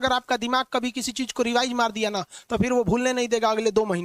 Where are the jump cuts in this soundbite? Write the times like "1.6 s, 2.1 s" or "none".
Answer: none